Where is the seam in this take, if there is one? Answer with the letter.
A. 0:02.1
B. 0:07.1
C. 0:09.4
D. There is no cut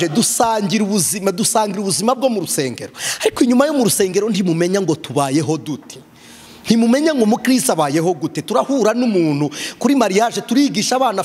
D